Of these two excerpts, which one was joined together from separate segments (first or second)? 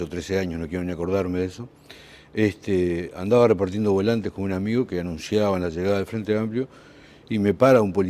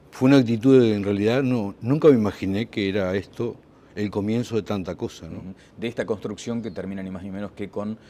first